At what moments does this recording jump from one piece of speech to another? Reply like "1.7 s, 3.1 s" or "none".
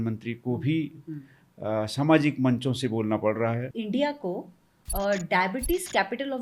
3.7 s